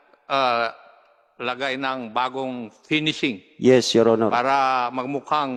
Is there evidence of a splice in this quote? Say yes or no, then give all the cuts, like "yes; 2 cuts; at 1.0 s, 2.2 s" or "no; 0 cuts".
no; 0 cuts